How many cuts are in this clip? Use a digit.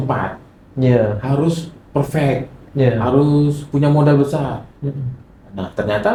0